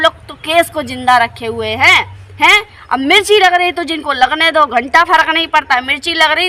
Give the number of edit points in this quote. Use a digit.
0